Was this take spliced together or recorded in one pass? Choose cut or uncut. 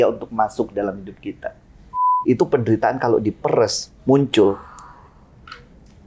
cut